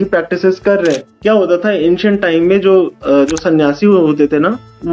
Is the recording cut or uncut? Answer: cut